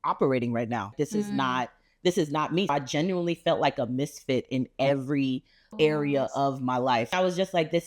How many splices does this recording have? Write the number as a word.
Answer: four